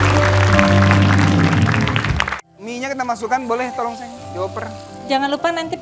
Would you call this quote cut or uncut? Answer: cut